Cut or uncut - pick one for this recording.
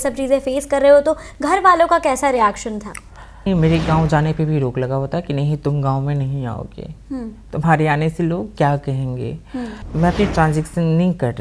cut